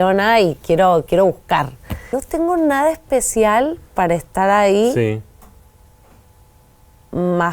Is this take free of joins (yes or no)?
no